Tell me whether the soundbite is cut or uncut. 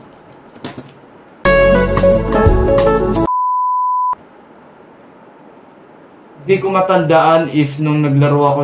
uncut